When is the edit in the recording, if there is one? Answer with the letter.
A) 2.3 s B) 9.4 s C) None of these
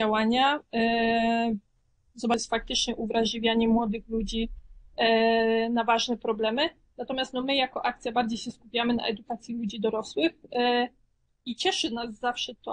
A